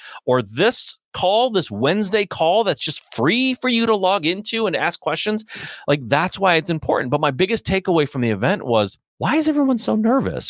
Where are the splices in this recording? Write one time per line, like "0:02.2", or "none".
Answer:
0:09.0